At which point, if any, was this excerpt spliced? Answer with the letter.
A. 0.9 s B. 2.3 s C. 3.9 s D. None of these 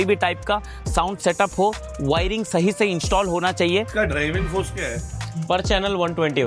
C